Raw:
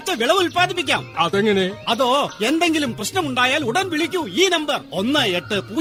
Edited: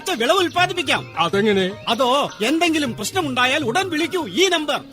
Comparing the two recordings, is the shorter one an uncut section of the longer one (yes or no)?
yes